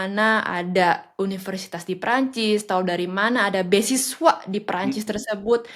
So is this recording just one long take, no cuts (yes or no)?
yes